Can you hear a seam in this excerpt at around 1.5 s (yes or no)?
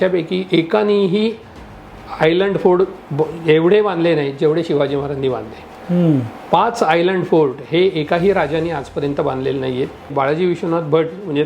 no